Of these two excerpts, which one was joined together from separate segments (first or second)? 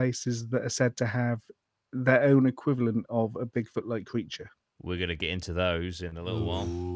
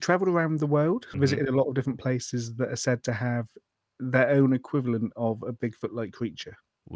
second